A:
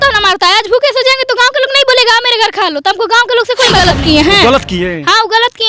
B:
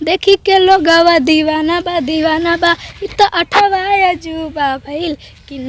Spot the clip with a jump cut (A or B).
A